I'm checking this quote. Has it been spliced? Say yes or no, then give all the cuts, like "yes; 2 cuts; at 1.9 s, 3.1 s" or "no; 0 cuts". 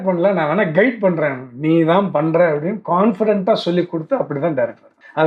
no; 0 cuts